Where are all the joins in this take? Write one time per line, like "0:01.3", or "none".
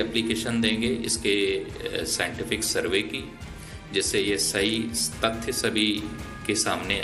none

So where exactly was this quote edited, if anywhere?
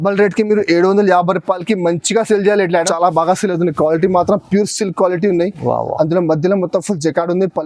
0:02.9

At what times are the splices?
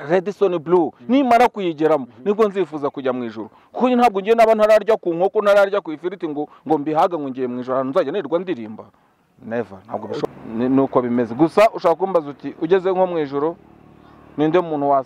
0:10.3

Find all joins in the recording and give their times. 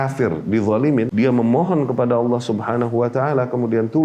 0:01.1

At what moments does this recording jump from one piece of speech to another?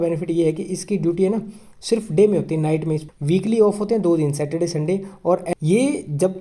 0:03.1
0:05.5

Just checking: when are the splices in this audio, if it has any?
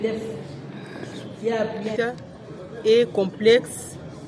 0:01.9

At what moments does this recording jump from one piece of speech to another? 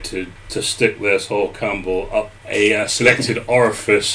0:02.4

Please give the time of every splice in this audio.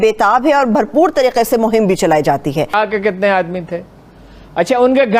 0:02.7

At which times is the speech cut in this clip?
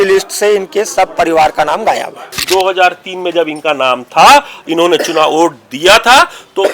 0:02.4

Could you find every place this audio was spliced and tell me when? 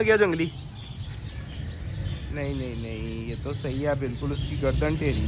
none

